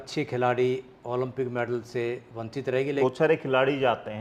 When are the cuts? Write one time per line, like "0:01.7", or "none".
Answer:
0:03.0